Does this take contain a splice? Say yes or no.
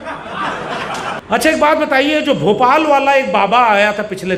yes